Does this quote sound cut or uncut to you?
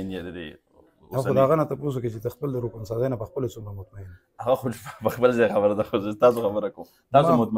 uncut